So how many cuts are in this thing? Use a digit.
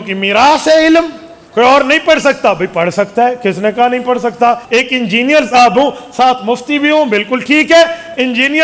2